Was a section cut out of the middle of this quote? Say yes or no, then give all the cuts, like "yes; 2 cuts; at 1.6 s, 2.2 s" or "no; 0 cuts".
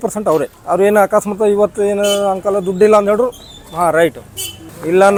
no; 0 cuts